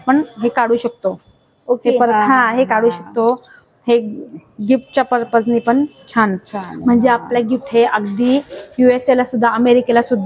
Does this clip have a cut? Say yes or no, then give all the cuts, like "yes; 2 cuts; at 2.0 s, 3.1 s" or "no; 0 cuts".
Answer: no; 0 cuts